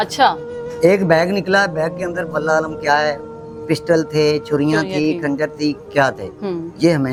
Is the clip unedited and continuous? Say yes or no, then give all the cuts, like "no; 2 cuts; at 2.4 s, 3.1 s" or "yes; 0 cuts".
yes; 0 cuts